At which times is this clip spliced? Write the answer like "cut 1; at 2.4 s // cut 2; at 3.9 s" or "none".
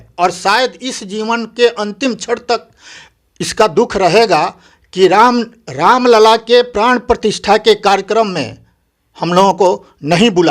none